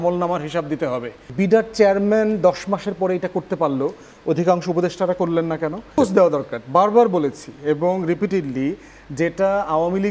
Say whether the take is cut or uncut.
cut